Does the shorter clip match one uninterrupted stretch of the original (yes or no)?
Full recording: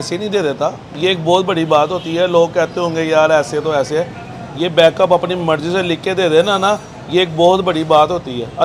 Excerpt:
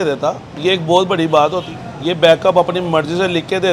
no